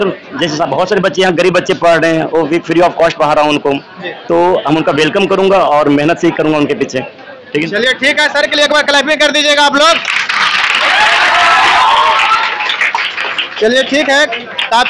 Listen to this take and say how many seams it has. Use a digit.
0